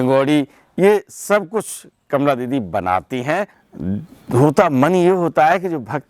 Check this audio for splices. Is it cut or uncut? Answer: cut